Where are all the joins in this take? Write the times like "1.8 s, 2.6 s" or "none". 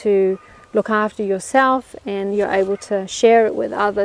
2.0 s